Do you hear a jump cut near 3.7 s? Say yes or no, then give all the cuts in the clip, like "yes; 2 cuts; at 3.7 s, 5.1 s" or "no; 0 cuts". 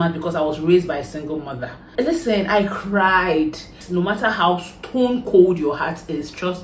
yes; 2 cuts; at 1.8 s, 3.7 s